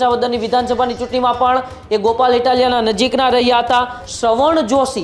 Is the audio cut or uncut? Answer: cut